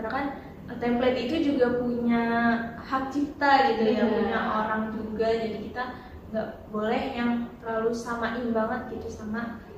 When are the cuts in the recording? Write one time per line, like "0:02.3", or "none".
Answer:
none